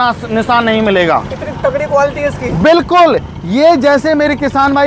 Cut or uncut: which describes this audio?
uncut